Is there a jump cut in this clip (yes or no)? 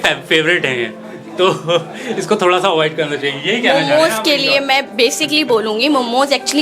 no